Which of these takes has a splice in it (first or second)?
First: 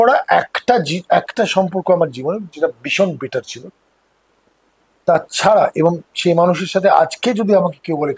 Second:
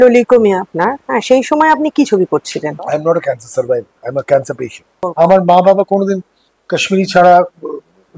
second